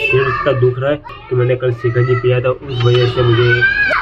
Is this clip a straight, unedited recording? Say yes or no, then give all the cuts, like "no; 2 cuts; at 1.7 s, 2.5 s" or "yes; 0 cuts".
no; 1 cut; at 1.1 s